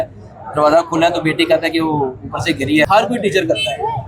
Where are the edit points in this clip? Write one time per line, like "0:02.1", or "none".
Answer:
0:02.9